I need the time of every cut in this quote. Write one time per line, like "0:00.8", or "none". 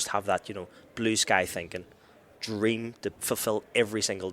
0:03.2